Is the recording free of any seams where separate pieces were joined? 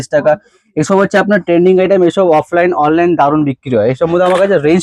yes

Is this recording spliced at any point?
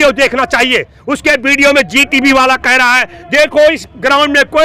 no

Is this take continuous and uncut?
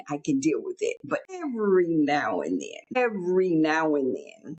no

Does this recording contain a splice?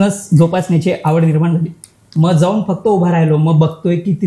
no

